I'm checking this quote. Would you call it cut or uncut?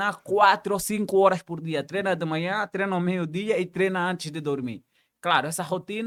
uncut